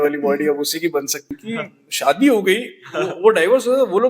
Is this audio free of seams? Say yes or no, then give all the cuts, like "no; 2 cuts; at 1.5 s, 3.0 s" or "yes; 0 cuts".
no; 1 cut; at 1.2 s